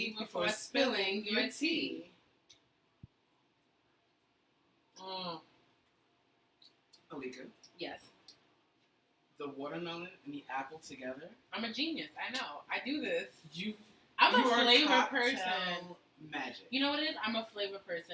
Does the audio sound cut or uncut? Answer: uncut